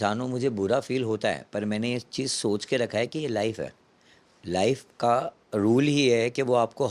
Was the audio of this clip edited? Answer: no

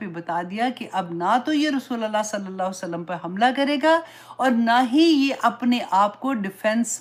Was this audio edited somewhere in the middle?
no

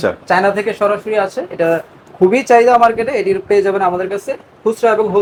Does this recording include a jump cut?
no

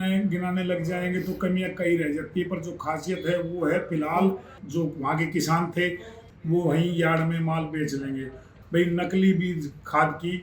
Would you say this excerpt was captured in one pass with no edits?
no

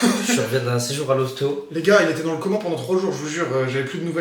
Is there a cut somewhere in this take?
no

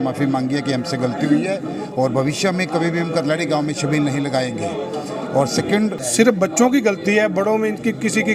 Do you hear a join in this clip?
yes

